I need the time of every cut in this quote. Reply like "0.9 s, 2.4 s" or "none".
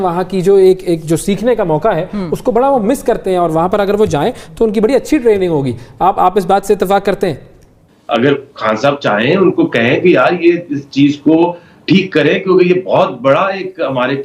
7.8 s